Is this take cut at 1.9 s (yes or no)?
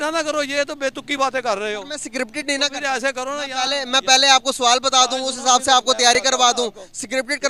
no